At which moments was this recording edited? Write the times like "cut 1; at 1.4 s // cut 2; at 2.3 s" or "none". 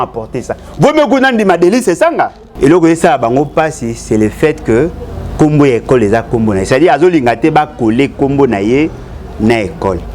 cut 1; at 2.4 s